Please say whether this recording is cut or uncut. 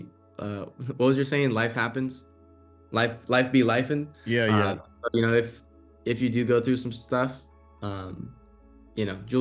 uncut